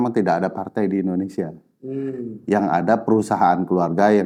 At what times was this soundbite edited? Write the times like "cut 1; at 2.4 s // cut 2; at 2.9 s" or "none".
none